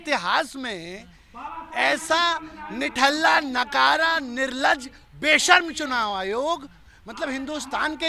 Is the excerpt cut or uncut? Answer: uncut